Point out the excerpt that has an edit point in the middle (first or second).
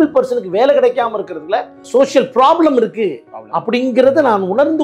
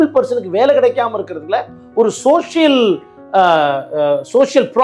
first